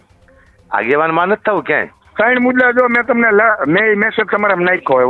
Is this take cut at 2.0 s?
yes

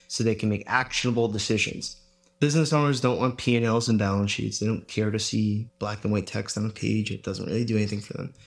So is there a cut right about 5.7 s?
yes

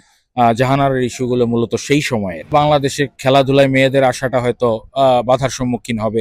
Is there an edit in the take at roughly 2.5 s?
yes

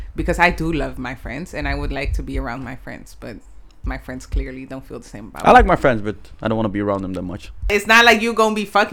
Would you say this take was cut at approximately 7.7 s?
yes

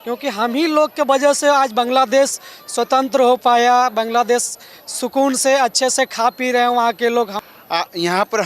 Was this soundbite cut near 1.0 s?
no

